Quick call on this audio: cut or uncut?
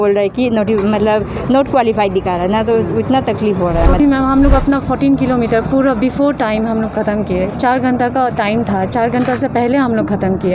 cut